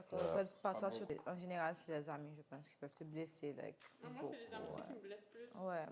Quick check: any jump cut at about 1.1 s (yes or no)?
yes